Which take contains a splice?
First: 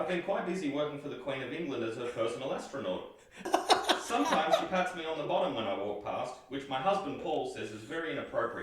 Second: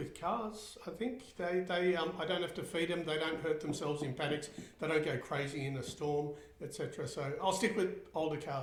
first; 1 cut; at 3.5 s

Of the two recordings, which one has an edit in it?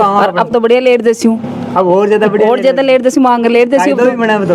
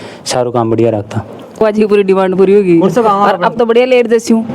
second; 1 cut; at 1.6 s

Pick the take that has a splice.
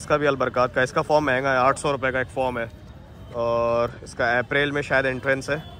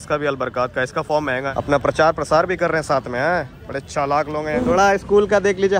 second; 2 cuts; at 1.5 s, 4.6 s

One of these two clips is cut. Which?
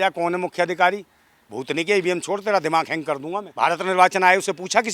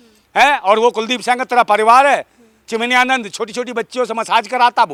first; 1 cut; at 3.4 s

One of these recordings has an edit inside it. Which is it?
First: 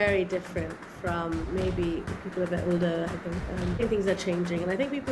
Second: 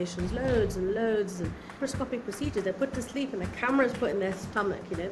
second; 1 cut; at 1.8 s

